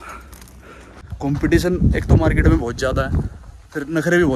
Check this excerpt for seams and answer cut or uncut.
cut